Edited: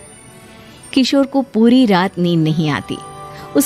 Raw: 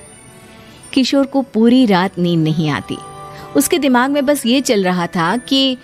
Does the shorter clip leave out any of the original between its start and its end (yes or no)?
no